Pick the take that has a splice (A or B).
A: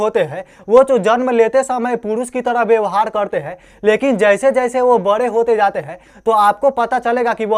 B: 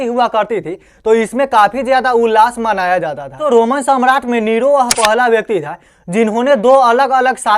B